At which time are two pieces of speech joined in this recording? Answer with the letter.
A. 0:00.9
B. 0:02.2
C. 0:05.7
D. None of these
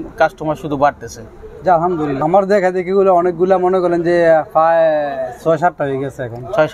B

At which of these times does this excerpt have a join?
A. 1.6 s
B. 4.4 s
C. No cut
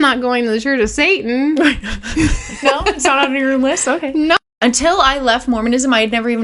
B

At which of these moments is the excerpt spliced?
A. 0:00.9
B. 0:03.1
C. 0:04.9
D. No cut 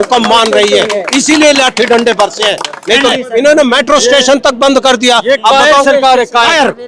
B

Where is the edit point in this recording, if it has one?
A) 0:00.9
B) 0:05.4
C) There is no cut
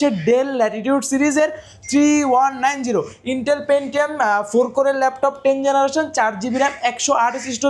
C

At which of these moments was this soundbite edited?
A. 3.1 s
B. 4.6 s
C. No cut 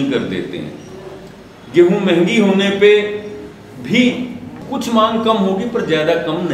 B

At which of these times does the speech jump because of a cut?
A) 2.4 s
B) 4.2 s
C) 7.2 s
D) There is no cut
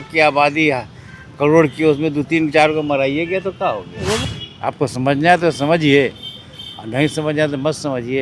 B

